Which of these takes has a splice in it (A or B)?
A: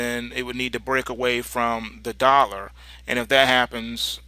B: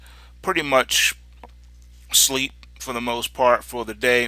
B